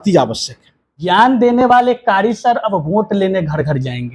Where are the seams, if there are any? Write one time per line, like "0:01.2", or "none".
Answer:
0:01.0